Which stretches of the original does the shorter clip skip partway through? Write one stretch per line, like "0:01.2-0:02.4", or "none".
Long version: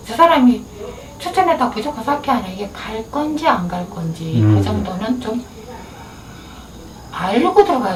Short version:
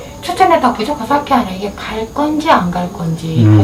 none